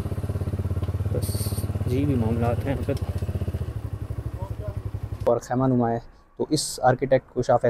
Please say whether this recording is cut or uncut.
cut